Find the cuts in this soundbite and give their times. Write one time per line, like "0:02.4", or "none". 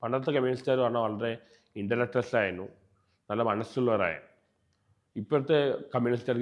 none